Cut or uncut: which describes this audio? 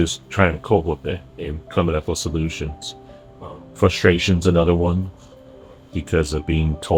uncut